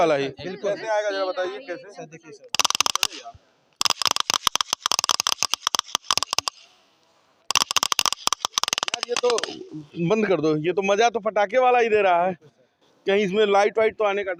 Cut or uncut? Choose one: uncut